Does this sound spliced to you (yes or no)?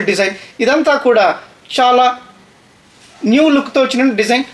no